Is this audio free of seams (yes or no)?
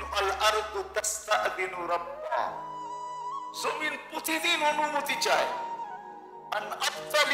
yes